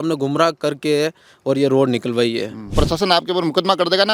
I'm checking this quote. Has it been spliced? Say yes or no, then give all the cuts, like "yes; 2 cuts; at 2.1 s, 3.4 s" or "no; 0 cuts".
yes; 1 cut; at 2.8 s